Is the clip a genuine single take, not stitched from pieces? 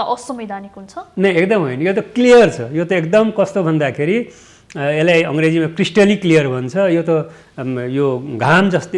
yes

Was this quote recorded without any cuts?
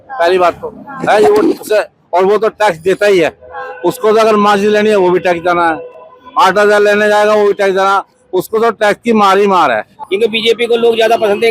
no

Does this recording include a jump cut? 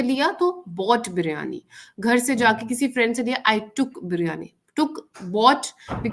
no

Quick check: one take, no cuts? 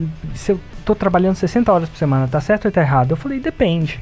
yes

